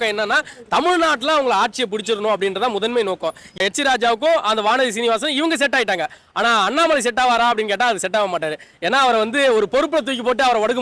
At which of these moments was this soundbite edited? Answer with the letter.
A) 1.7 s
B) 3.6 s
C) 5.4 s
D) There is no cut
B